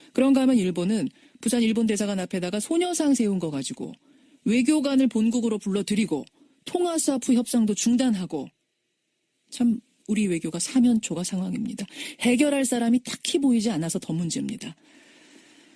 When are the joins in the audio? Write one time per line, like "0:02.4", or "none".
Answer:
0:02.0